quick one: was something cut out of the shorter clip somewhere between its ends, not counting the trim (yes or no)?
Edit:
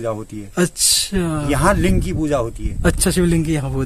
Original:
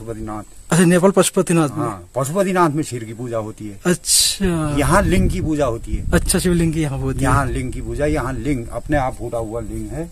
no